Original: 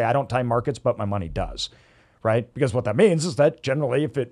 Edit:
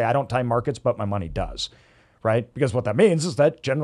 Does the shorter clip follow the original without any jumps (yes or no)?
yes